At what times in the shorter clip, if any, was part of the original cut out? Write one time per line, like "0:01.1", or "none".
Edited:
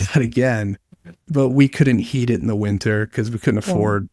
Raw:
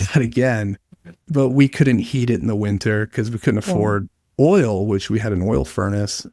none